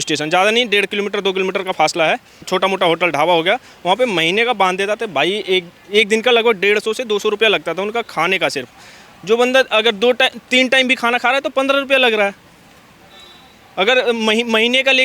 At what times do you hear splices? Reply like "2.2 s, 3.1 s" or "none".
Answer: 2.5 s